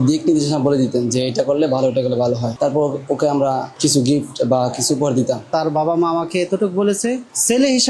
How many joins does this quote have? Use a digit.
1